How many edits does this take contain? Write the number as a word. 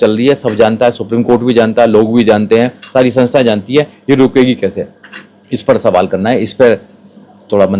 zero